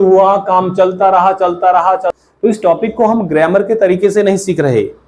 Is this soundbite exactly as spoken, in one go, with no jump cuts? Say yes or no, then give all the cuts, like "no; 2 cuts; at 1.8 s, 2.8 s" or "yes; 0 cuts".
no; 1 cut; at 2.1 s